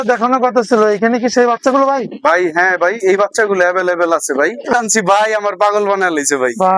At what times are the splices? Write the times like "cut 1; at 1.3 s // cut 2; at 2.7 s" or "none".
cut 1; at 4.7 s